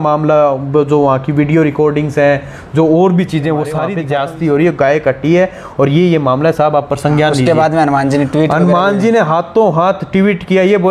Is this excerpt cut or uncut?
cut